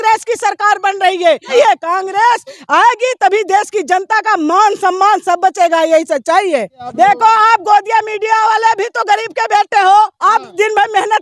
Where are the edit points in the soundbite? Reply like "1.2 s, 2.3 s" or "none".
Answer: 1.5 s, 6.8 s